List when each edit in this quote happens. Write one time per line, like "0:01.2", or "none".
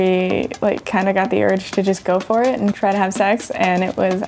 0:02.8